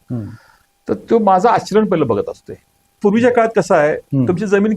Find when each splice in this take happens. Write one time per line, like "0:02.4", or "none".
0:03.0